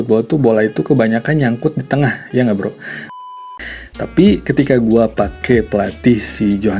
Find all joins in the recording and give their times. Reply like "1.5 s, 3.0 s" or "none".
3.1 s